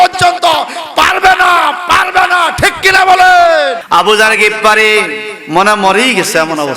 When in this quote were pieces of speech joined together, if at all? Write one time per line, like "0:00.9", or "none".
0:03.8

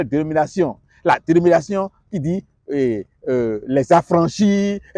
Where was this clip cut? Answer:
none

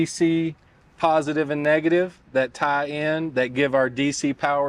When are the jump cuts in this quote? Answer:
none

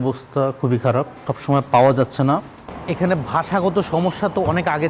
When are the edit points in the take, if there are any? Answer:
none

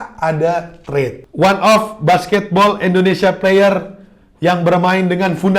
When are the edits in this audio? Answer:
0:01.2

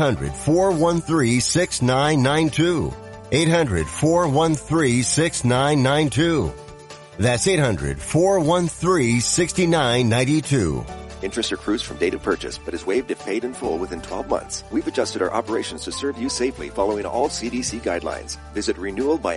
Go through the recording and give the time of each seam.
0:14.6

